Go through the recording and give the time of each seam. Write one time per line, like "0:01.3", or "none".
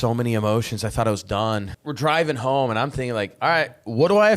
0:01.8

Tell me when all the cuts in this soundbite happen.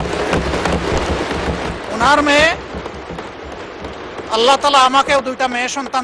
0:01.7

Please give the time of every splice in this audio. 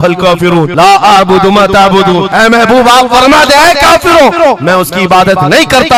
none

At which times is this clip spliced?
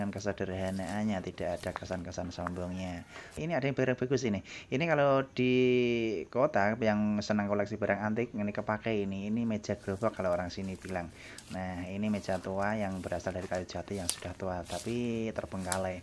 0:03.4

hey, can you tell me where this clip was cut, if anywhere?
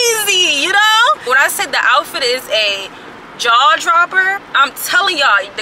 0:01.3
0:04.5

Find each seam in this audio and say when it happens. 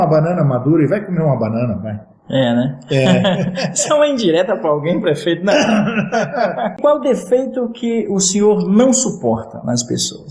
0:06.8

